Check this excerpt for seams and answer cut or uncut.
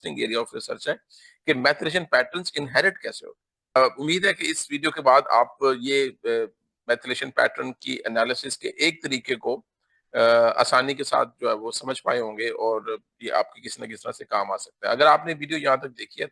cut